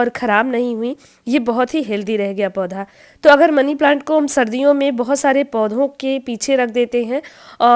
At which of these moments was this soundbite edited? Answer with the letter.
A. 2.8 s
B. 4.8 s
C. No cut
C